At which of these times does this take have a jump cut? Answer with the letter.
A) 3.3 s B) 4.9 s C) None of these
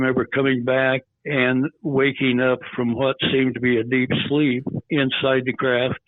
B